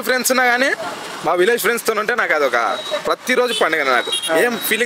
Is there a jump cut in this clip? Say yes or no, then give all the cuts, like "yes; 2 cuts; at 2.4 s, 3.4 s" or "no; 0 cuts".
no; 0 cuts